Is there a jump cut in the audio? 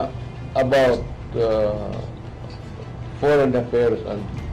no; 0 cuts

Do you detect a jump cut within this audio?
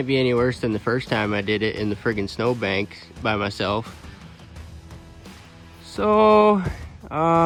no; 0 cuts

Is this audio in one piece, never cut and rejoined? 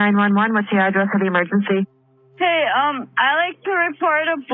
yes; 0 cuts

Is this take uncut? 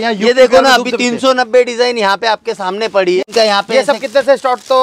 no; 1 cut; at 3.2 s

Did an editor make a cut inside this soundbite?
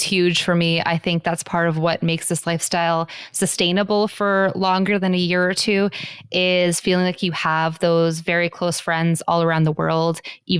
no; 0 cuts

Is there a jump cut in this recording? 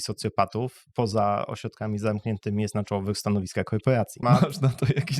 yes; 1 cut; at 4.2 s

